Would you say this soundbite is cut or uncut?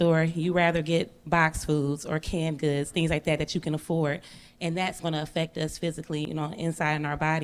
cut